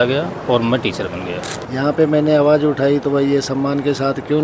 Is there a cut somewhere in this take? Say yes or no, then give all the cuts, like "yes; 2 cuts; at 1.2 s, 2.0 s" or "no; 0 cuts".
yes; 1 cut; at 1.6 s